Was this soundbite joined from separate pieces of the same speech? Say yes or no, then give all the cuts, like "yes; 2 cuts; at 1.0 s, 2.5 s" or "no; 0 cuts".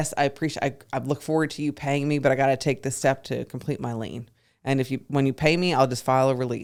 no; 0 cuts